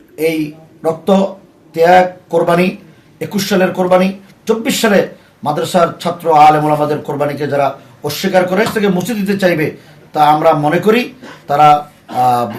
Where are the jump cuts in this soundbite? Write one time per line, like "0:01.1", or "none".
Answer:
0:08.7